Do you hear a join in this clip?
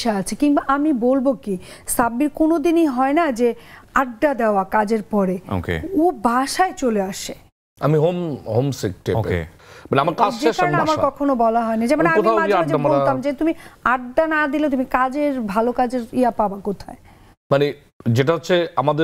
no; 0 cuts

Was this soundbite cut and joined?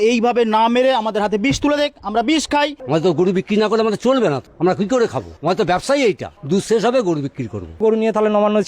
yes; 5 cuts; at 2.8 s, 4.5 s, 5.3 s, 6.3 s, 7.8 s

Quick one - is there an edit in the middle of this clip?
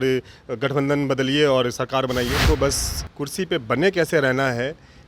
yes; 1 cut; at 2.4 s

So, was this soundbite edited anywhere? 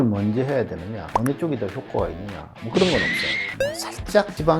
yes; 2 cuts; at 0.9 s, 3.6 s

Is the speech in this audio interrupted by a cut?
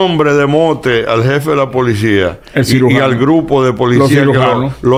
no; 0 cuts

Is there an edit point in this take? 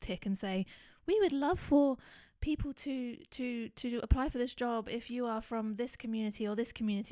no; 0 cuts

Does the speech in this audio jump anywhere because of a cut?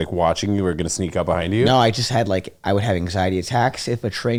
no; 0 cuts

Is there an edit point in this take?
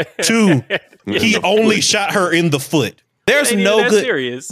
yes; 2 cuts; at 1.0 s, 3.0 s

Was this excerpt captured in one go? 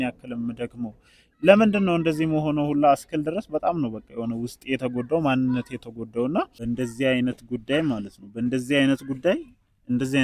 no; 1 cut; at 6.5 s

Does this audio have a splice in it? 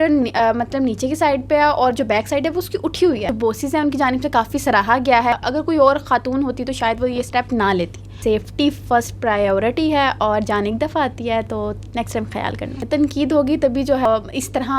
yes; 5 cuts; at 3.3 s, 5.3 s, 8.2 s, 12.8 s, 14.0 s

